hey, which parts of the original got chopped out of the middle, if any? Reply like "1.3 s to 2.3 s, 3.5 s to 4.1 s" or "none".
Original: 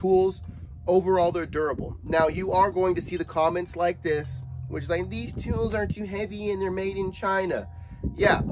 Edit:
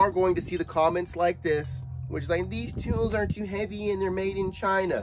none